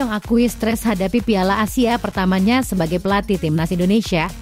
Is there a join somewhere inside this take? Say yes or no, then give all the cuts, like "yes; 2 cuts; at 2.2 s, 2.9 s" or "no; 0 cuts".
no; 0 cuts